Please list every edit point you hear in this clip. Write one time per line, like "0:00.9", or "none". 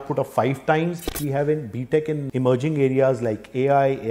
0:01.2
0:02.3